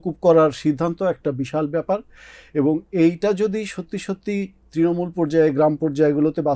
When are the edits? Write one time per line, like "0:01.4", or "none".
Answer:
none